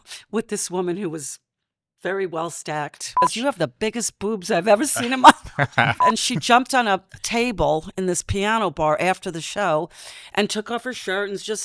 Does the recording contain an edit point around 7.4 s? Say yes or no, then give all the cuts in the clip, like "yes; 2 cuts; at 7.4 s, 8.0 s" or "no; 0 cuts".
no; 2 cuts; at 3.3 s, 6.0 s